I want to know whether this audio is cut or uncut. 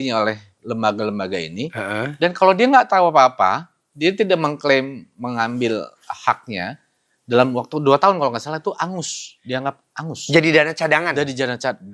uncut